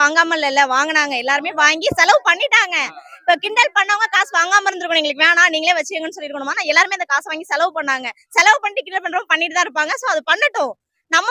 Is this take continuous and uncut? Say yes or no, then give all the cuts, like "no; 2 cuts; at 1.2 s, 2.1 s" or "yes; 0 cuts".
yes; 0 cuts